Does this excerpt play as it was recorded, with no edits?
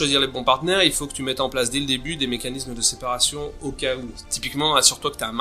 no; 1 cut; at 4.2 s

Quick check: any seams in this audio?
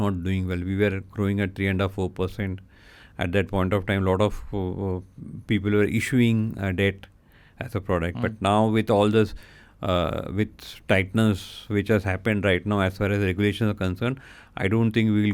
no; 0 cuts

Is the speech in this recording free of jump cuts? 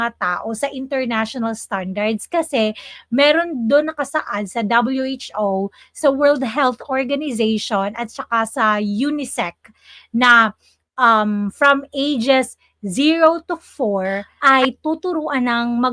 no; 1 cut; at 14.3 s

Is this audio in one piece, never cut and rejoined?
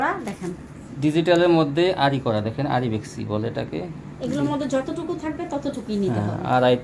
yes; 0 cuts

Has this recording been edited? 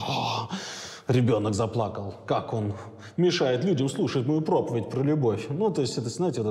no; 0 cuts

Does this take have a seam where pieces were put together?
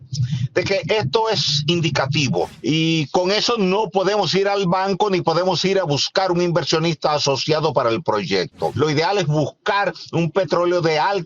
yes; 2 cuts; at 2.5 s, 8.7 s

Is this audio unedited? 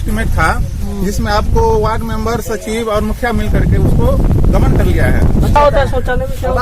no; 1 cut; at 5.6 s

